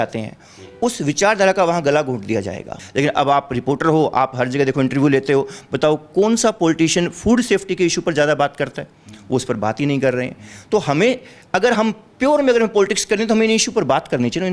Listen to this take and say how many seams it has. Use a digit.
1